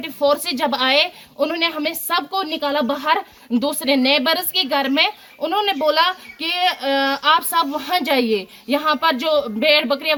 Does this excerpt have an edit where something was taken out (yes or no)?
no